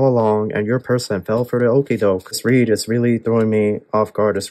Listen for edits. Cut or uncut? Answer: cut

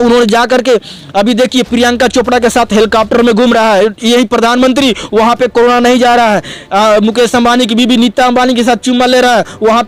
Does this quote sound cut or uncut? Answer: uncut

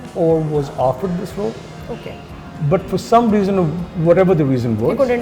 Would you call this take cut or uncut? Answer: uncut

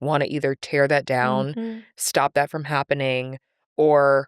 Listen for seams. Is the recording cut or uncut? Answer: uncut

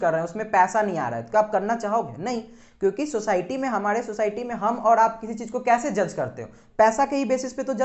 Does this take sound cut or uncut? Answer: uncut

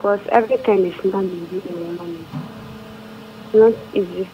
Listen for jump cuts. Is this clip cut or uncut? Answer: uncut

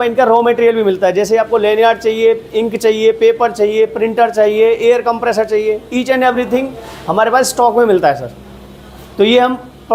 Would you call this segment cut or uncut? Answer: uncut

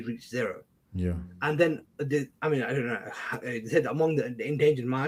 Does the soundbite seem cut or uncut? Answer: uncut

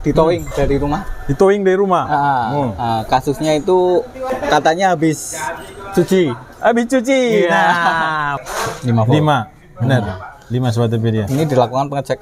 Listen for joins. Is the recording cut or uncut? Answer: cut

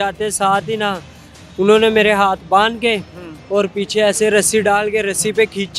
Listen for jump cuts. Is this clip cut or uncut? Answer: uncut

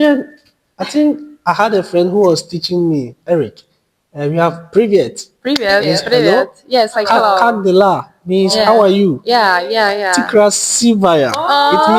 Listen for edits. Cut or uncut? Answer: uncut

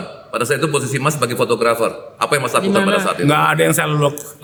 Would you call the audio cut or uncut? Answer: uncut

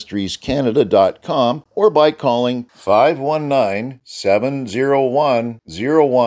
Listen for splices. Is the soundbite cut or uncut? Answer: cut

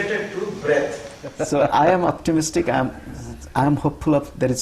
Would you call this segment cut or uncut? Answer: cut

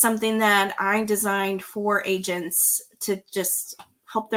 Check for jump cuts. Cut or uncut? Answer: uncut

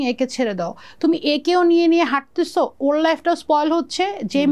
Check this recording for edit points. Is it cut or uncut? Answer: uncut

